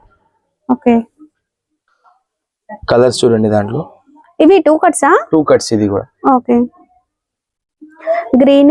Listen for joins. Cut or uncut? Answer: uncut